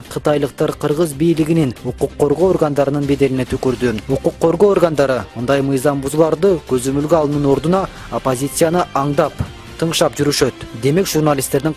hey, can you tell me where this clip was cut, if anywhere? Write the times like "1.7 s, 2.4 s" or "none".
3.8 s

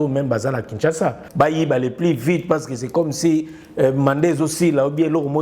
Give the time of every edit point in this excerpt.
1.2 s

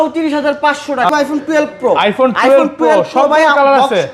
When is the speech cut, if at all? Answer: 1.1 s

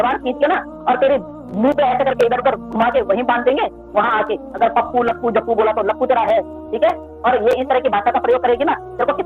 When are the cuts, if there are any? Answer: none

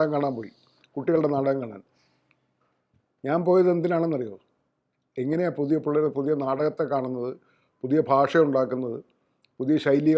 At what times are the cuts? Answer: none

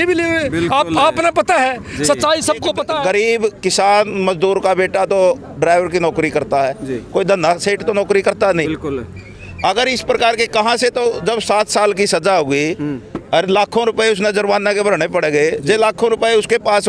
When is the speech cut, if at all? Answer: 2.9 s

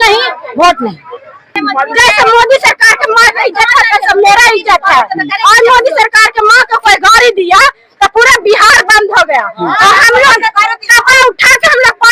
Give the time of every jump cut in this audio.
1.5 s

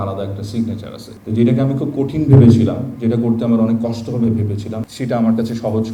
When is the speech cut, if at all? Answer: 1.0 s, 4.7 s

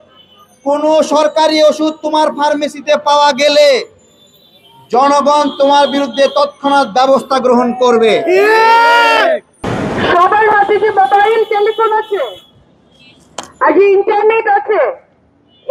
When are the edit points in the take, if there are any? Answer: 9.6 s

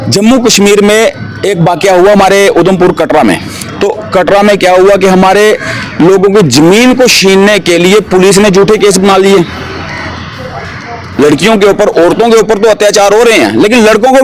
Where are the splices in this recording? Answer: none

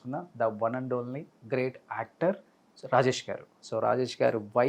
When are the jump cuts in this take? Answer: 3.6 s

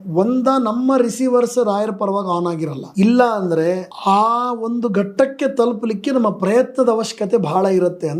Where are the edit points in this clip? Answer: 2.8 s, 3.9 s

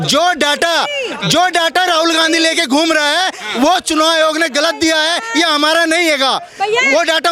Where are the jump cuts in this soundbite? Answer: none

